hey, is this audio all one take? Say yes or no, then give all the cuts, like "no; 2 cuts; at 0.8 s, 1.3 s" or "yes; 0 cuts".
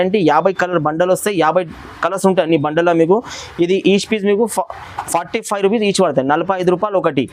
yes; 0 cuts